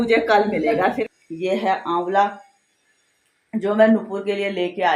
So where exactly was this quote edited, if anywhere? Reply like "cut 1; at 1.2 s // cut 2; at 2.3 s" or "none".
cut 1; at 1.0 s